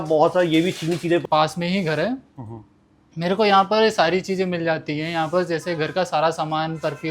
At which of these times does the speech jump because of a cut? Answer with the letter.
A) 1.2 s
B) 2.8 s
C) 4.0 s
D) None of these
A